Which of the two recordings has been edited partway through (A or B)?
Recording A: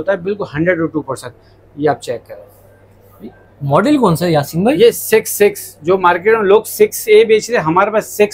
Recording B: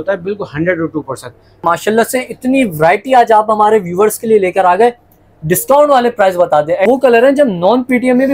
B